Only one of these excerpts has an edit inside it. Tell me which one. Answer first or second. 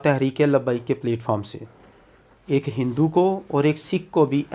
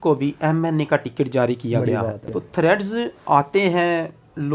second